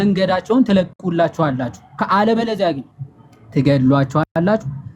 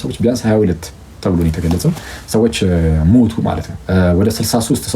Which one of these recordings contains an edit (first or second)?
second